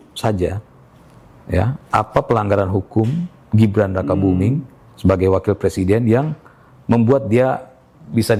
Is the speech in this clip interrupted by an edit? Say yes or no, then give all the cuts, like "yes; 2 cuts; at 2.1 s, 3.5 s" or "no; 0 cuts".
no; 0 cuts